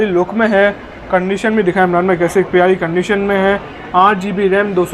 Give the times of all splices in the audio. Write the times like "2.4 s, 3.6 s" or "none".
none